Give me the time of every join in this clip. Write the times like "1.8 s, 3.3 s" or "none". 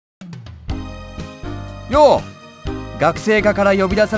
1.8 s